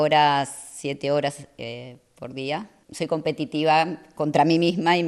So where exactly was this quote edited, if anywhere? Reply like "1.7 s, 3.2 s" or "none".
2.8 s